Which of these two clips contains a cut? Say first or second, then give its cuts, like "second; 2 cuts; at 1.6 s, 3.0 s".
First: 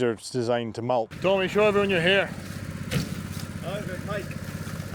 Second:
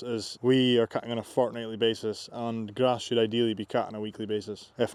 first; 1 cut; at 1.1 s